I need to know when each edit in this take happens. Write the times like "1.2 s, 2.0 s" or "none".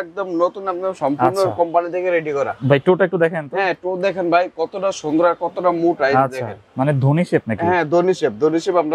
none